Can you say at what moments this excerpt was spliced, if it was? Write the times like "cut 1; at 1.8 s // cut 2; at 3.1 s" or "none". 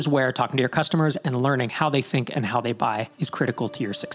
cut 1; at 3.1 s